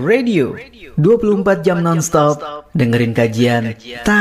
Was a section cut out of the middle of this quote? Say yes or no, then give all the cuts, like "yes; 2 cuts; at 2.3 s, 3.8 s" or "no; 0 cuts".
no; 0 cuts